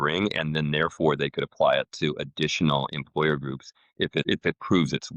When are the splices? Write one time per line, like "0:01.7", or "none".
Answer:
0:04.2